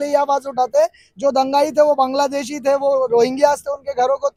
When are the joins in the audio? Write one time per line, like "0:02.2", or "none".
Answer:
none

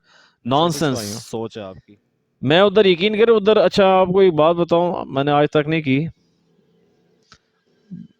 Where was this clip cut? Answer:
0:01.7

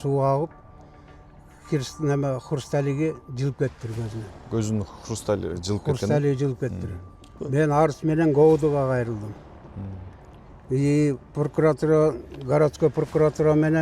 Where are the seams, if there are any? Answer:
0:07.3

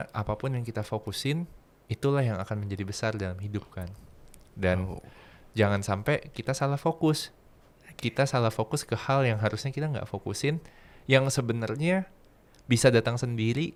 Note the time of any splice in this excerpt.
none

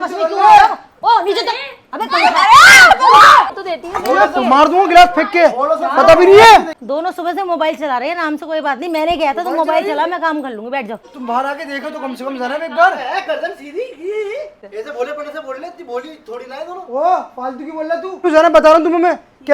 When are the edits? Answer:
0:03.5
0:06.7
0:11.1
0:14.6
0:18.2

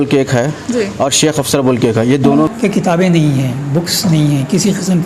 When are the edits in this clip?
0:02.5

